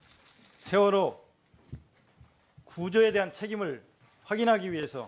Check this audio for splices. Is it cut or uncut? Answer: uncut